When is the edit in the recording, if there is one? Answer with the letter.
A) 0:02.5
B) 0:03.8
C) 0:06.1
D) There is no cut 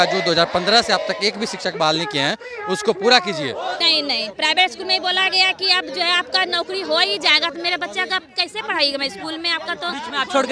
B